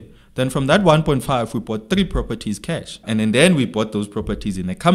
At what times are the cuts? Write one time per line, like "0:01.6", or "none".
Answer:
0:03.0